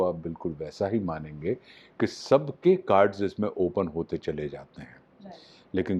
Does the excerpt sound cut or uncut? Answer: uncut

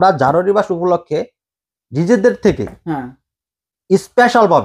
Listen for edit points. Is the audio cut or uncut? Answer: uncut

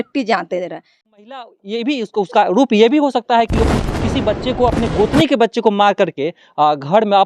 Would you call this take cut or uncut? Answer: cut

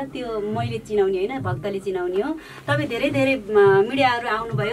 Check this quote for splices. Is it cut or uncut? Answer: uncut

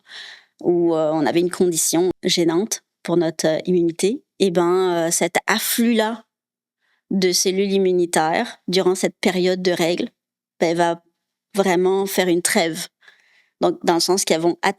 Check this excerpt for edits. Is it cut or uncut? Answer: cut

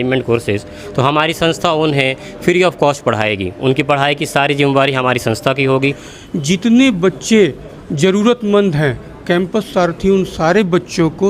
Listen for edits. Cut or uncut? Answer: cut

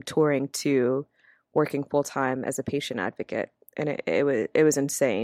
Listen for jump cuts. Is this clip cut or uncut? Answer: uncut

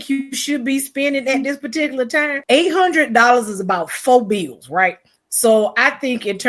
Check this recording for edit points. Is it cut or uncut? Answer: cut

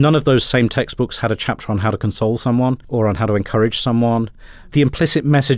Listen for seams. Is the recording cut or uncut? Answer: cut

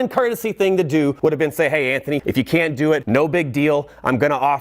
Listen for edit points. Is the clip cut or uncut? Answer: cut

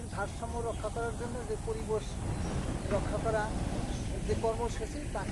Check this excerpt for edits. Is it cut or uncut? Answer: uncut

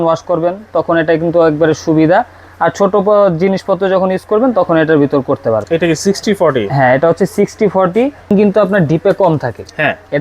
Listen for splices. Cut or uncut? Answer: cut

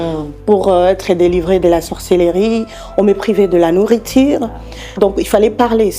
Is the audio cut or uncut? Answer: cut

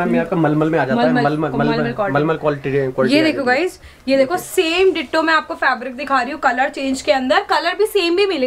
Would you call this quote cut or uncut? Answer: uncut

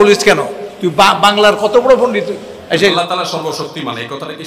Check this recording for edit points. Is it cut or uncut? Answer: cut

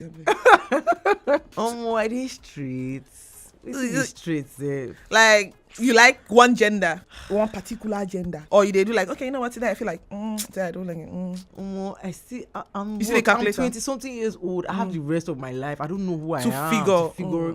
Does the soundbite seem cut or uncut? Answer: cut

